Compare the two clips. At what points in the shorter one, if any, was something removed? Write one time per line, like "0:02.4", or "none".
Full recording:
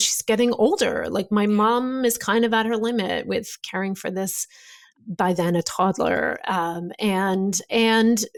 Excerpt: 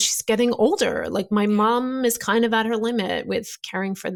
none